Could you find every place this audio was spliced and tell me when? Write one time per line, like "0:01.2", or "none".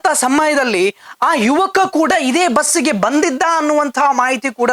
none

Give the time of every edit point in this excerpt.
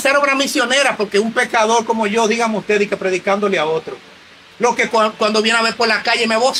none

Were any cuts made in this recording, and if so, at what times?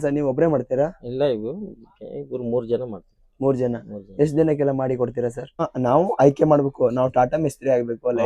0:05.7

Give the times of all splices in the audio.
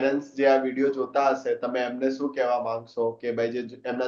none

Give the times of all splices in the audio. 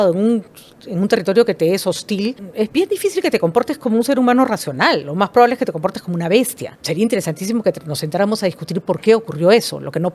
0:02.4
0:06.7

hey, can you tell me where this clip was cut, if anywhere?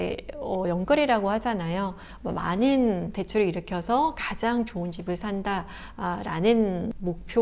none

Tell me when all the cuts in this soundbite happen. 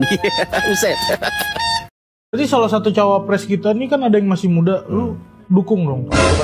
0:01.9

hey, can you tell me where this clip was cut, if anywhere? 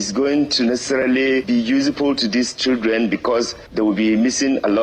none

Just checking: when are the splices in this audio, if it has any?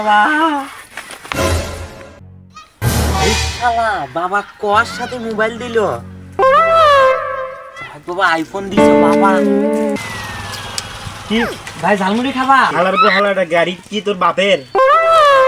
0:10.0

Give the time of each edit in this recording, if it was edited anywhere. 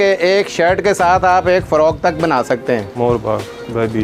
0:02.9

